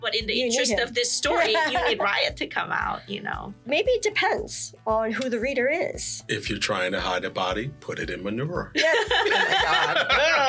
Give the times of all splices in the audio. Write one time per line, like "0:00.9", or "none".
0:03.6

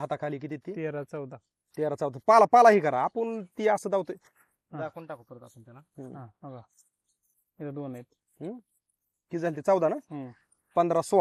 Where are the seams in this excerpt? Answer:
none

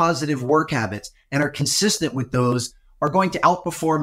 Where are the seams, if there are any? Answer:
none

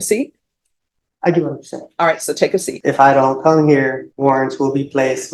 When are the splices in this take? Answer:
0:02.7
0:04.1

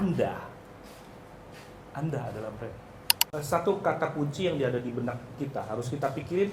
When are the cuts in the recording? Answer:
0:03.3

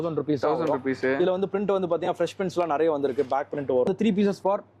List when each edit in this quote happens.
0:03.9

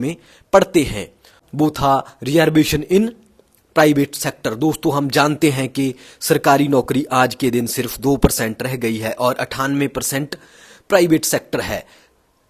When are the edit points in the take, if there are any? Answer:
0:01.4

